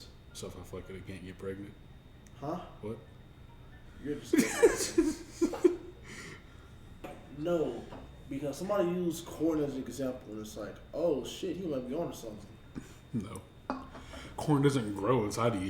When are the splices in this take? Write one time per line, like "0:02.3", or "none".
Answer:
0:07.1